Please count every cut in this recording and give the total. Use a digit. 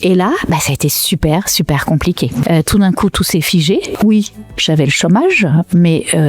2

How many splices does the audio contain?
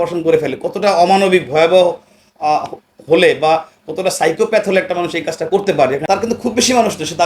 1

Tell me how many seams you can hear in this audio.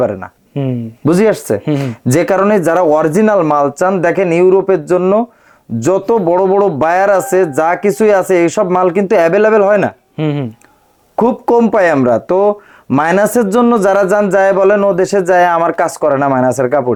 0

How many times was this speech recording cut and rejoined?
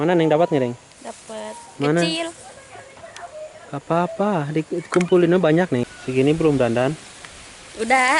1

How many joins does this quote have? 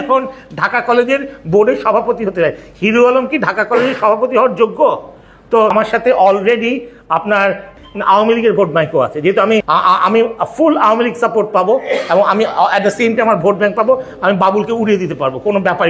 3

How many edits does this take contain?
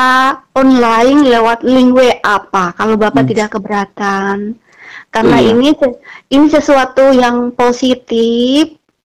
0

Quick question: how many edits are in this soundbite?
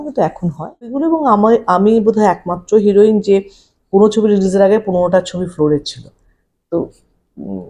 1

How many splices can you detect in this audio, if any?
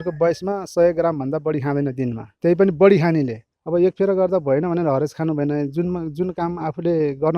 2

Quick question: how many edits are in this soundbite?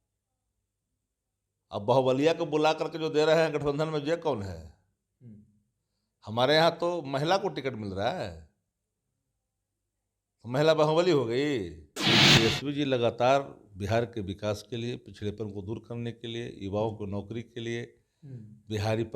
1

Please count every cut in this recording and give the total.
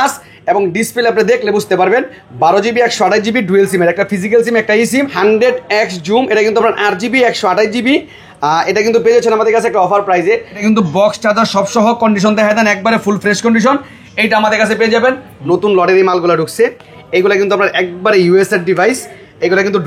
3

